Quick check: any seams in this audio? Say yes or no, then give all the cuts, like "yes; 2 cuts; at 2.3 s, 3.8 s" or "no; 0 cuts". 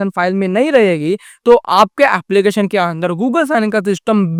no; 0 cuts